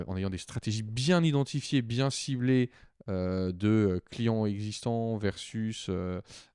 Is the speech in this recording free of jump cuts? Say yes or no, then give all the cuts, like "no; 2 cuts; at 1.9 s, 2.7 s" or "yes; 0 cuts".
yes; 0 cuts